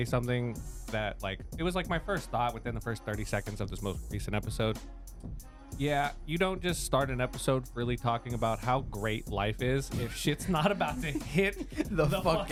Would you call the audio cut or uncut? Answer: uncut